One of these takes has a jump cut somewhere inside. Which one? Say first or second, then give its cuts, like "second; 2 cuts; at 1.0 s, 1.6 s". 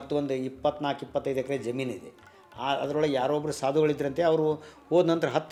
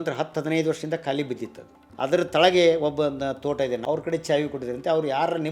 second; 2 cuts; at 1.8 s, 3.8 s